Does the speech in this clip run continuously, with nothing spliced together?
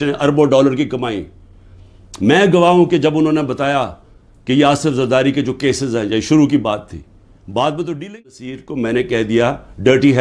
no; 1 cut; at 8.6 s

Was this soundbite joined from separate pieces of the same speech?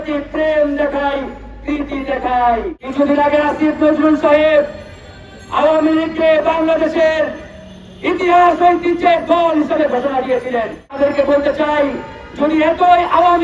yes; 2 cuts; at 2.8 s, 10.9 s

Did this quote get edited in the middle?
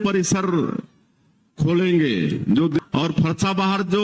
yes; 1 cut; at 2.8 s

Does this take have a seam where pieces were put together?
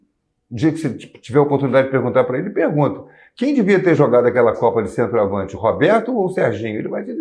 no; 0 cuts

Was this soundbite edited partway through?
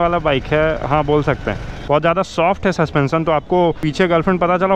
yes; 2 cuts; at 1.9 s, 3.8 s

